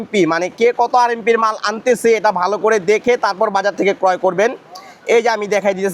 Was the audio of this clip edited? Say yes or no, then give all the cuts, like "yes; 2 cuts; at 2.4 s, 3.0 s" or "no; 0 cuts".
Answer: no; 0 cuts